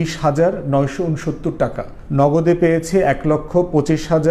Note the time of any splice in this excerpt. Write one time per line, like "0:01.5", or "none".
none